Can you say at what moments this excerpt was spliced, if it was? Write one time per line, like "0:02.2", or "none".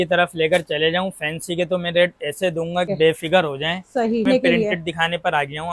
0:02.9
0:04.3